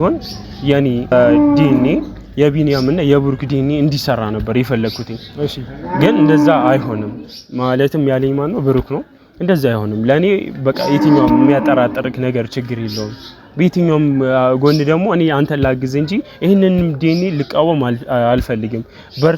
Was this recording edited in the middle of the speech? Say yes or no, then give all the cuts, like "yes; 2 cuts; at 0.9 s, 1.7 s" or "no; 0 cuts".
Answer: yes; 1 cut; at 1.1 s